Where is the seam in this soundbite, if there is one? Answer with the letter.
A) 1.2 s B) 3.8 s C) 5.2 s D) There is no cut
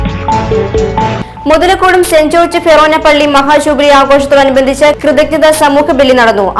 A